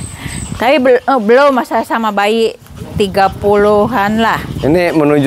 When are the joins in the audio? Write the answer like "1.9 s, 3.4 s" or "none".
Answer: none

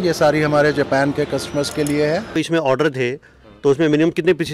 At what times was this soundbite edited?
2.4 s

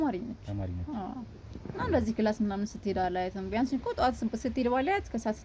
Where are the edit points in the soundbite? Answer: none

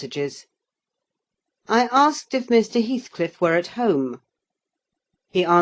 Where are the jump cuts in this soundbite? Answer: 4.5 s

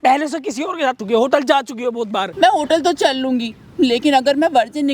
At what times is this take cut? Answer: 1.0 s, 2.3 s

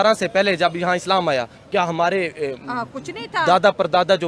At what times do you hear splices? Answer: none

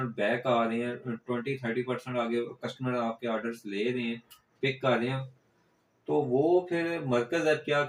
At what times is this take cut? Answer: none

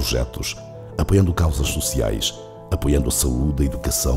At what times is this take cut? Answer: none

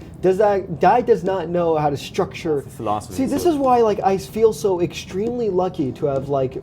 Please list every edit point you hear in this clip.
2.7 s

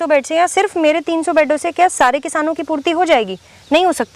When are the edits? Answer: none

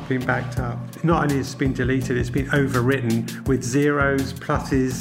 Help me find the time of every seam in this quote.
0.9 s

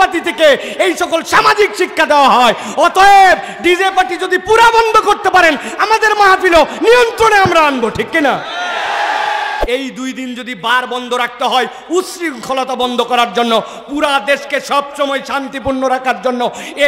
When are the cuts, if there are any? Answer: 9.6 s

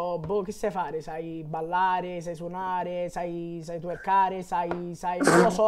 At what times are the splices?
none

